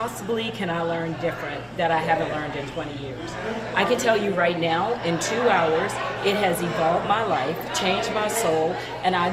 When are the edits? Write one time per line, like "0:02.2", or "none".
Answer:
none